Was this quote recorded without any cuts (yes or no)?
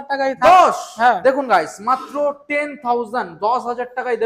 yes